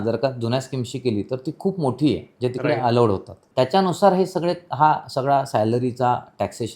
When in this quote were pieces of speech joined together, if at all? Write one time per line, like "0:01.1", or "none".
0:03.4